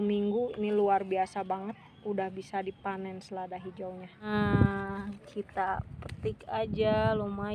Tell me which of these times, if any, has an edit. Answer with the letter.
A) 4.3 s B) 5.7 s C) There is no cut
A